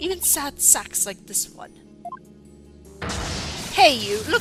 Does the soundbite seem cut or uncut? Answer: uncut